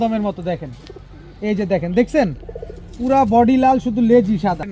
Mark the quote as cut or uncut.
uncut